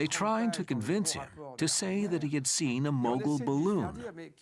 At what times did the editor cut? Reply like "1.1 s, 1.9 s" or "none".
1.0 s